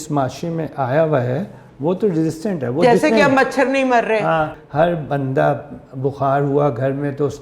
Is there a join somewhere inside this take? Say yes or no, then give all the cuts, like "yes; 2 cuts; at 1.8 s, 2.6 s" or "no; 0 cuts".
yes; 1 cut; at 4.5 s